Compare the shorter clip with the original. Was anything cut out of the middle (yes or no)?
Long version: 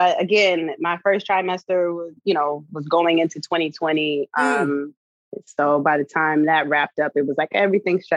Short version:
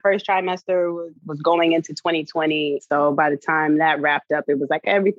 yes